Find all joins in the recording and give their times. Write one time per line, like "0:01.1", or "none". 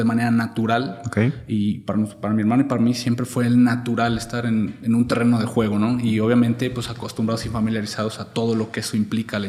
none